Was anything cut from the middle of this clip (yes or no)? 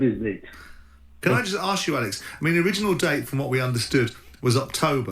yes